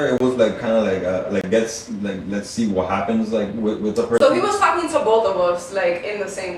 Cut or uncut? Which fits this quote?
uncut